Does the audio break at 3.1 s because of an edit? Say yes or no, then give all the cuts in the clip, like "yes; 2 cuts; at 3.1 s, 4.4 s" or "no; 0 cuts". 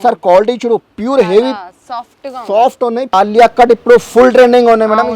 yes; 1 cut; at 3.1 s